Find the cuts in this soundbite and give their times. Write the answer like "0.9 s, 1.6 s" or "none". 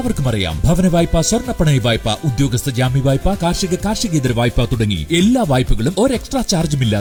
none

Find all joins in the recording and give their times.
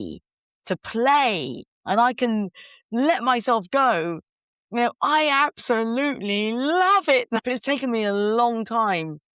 7.4 s

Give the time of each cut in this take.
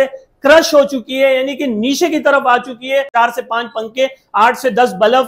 3.1 s

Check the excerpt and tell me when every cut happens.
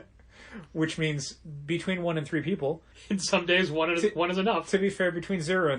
2.9 s

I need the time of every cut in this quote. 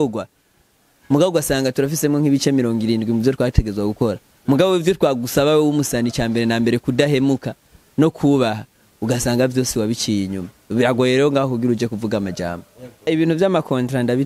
13.1 s

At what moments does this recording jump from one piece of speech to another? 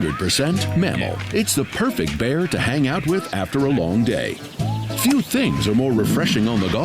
5.9 s

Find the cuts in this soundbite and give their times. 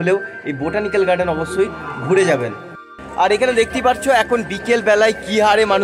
3.0 s

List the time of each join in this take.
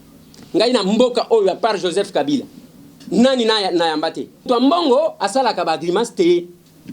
4.5 s

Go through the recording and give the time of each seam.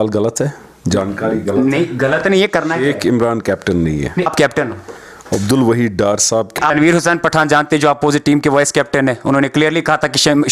4.3 s, 6.5 s

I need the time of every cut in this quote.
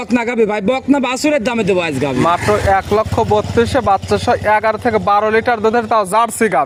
none

